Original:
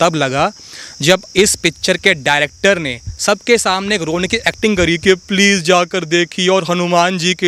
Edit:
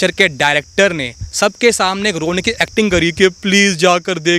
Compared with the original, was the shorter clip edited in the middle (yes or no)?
no